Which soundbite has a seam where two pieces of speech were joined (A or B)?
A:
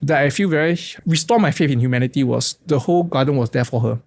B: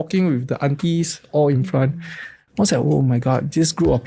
A